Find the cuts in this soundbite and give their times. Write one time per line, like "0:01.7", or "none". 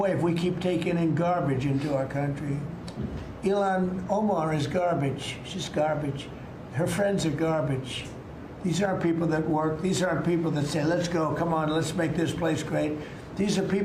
none